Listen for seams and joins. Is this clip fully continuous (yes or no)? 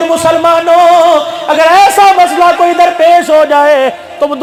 yes